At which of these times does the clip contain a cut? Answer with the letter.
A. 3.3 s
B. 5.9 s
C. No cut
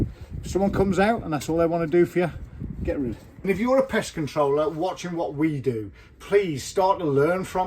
A